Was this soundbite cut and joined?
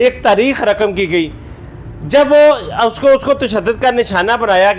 no; 0 cuts

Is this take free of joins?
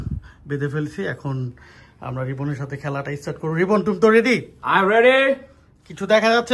yes; 0 cuts

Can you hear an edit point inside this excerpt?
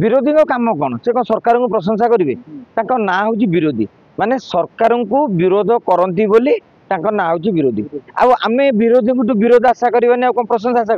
no; 0 cuts

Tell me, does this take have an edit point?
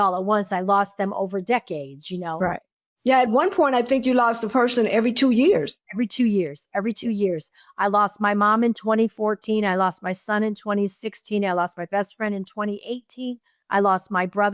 no; 0 cuts

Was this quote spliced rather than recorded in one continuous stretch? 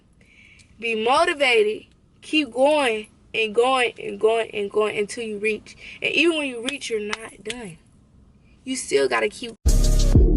yes; 1 cut; at 9.5 s

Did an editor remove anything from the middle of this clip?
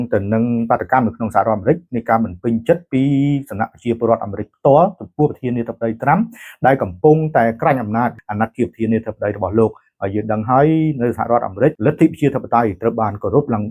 yes; 2 cuts; at 8.2 s, 11.8 s

